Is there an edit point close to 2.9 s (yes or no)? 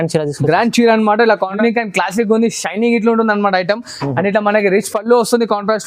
no